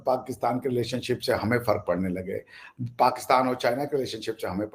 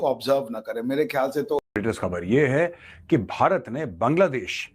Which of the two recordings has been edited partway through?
second; 1 cut; at 1.7 s

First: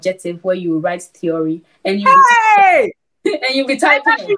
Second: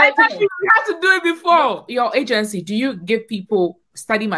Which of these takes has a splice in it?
second; 1 cut; at 1.9 s

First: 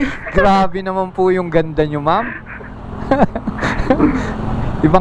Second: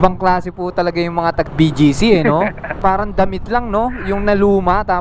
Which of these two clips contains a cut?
second; 2 cuts; at 1.5 s, 2.7 s

